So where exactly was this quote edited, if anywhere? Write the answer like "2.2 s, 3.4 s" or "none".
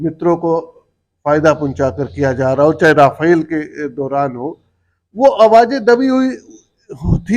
none